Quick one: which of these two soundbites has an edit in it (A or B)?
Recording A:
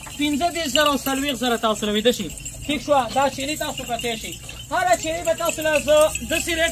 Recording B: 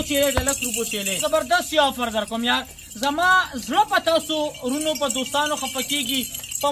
B